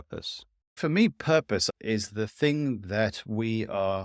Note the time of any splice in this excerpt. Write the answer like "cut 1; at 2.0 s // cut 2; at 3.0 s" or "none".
cut 1; at 0.8 s // cut 2; at 1.7 s